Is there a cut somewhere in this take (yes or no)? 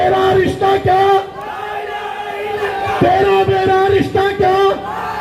no